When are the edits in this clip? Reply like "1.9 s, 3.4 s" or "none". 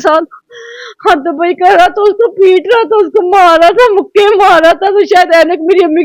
none